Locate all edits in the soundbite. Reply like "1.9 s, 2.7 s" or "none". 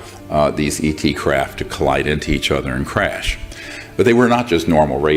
none